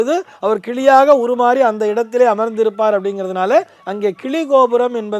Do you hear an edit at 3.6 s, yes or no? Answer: no